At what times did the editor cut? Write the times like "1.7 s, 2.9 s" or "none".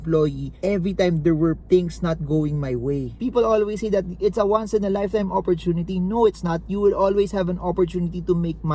3.1 s